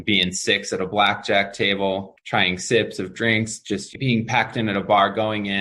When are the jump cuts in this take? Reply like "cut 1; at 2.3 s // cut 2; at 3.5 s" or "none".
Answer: none